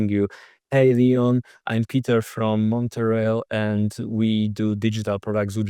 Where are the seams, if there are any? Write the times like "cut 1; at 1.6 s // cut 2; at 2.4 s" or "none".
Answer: none